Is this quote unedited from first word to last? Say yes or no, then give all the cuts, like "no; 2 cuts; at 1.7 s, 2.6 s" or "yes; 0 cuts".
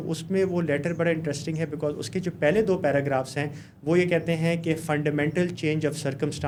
yes; 0 cuts